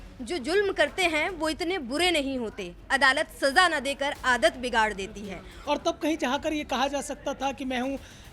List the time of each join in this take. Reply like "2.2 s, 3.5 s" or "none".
5.5 s